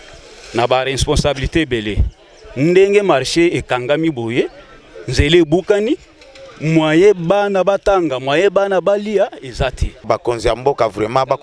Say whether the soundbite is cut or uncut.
cut